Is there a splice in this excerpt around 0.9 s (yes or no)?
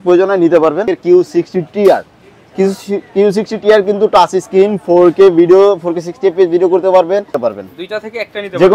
yes